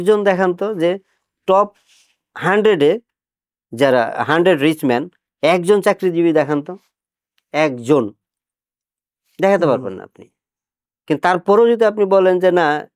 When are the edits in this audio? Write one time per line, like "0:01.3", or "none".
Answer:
none